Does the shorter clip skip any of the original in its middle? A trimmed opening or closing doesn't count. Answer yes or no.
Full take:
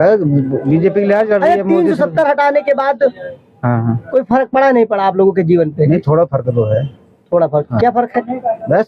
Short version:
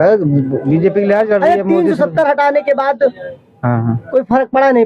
no